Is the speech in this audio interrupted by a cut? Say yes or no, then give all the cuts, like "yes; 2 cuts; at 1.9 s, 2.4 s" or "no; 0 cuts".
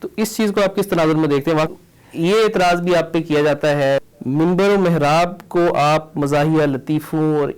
yes; 2 cuts; at 1.7 s, 4.0 s